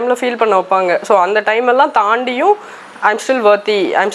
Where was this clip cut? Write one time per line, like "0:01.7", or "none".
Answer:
none